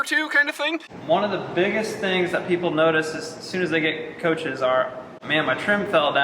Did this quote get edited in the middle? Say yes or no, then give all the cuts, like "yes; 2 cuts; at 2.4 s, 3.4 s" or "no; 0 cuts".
yes; 1 cut; at 0.9 s